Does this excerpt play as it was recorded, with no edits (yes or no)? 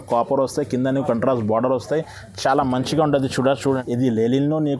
no